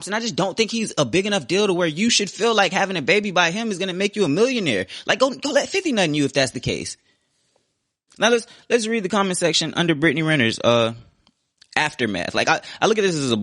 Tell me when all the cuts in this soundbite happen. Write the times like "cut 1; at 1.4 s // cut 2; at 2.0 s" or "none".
none